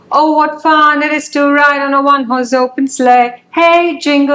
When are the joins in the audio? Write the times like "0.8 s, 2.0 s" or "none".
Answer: none